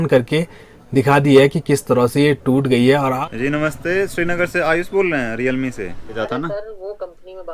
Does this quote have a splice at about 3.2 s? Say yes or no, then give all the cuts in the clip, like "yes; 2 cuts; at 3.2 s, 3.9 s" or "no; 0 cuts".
yes; 2 cuts; at 3.2 s, 6.2 s